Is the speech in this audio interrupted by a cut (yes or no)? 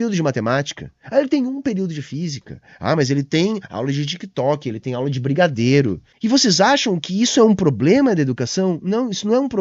yes